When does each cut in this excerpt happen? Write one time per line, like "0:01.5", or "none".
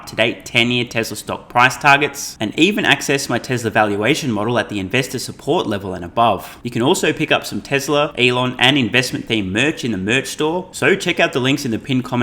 0:06.6
0:08.1
0:10.7